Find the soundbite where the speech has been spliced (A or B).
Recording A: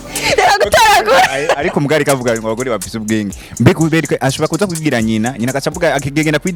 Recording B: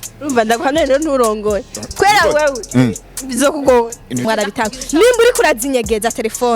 B